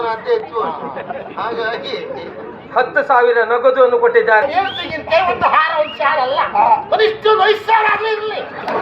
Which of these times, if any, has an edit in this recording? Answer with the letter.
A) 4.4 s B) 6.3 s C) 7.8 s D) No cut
A